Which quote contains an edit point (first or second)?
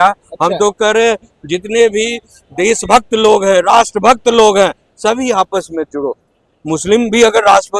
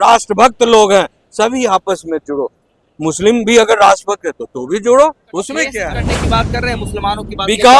second